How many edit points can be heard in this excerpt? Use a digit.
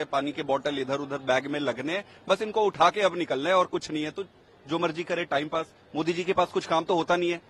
0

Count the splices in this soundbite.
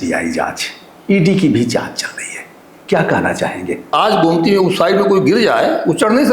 1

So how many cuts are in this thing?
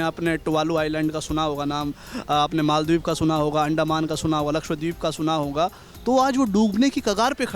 0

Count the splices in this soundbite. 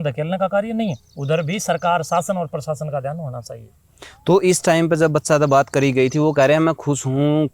0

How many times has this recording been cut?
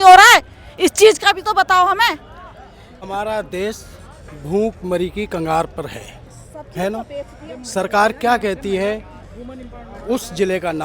1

